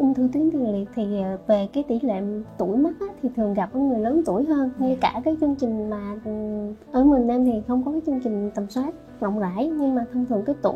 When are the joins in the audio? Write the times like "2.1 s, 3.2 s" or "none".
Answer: none